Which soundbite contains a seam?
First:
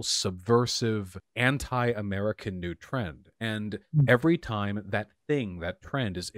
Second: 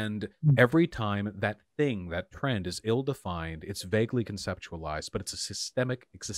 first; 1 cut; at 1.2 s

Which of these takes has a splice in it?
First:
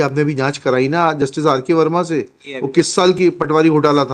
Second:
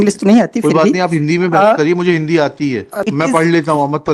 second; 1 cut; at 3.0 s

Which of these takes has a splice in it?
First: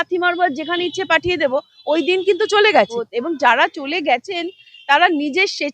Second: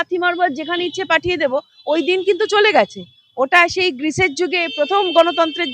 first; 1 cut; at 3.0 s

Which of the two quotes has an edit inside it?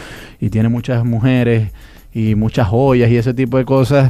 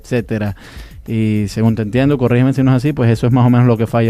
second; 1 cut; at 1.0 s

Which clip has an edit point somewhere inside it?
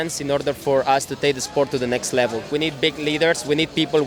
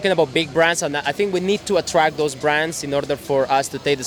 first; 1 cut; at 2.5 s

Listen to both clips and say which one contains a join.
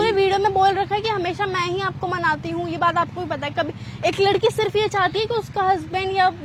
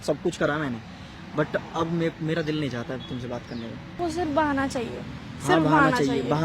second; 1 cut; at 4.0 s

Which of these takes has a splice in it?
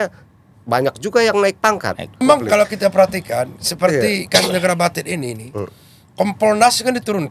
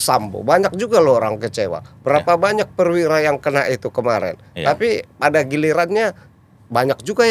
first; 1 cut; at 2.2 s

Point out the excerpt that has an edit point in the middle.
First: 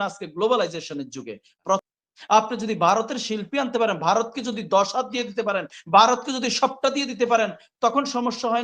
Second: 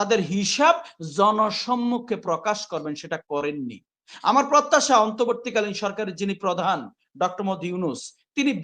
first; 1 cut; at 1.9 s

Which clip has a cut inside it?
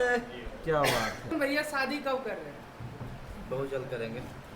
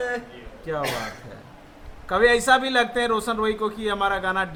first; 1 cut; at 1.3 s

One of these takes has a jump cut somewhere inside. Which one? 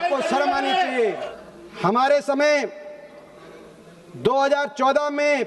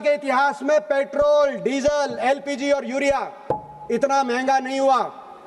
first; 1 cut; at 1.3 s

